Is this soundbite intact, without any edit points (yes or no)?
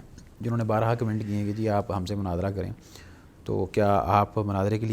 yes